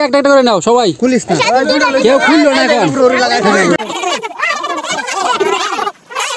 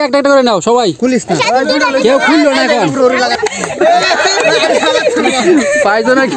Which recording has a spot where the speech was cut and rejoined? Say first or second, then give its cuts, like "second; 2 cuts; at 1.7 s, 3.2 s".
second; 1 cut; at 3.4 s